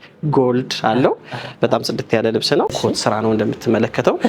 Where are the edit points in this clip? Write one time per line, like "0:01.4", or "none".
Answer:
0:02.7